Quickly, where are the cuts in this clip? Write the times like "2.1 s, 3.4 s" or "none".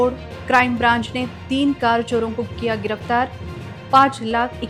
none